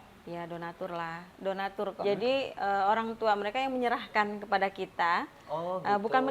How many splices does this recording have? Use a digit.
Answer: 1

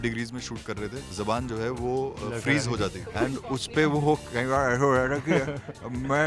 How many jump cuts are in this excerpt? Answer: 2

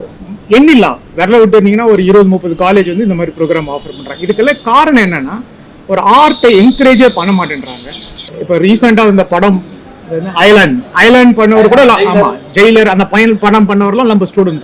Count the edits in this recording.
1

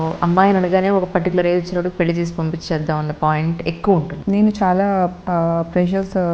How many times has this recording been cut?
1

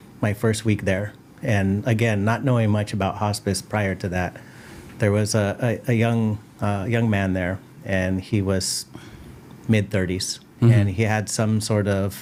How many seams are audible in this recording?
0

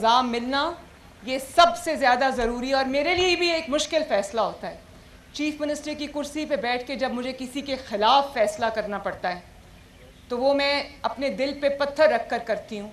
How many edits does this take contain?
0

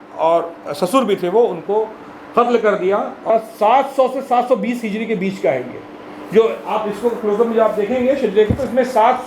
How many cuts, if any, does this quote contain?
1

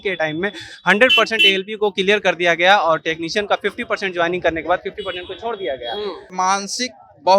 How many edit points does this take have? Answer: 1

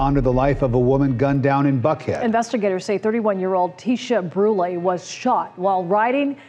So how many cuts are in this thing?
0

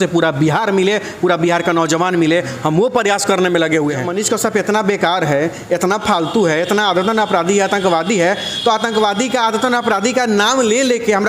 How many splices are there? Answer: 1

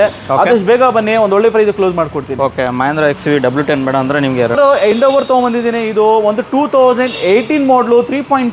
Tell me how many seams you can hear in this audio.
0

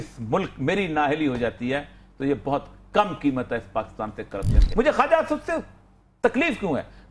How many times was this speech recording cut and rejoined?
1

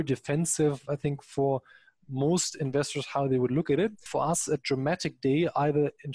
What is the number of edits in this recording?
1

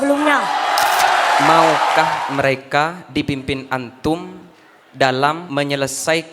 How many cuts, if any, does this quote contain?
2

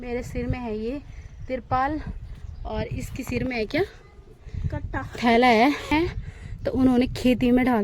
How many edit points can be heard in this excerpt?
1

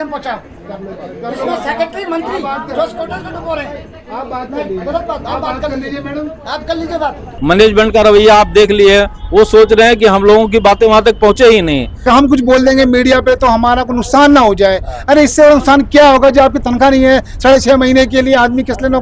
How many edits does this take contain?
2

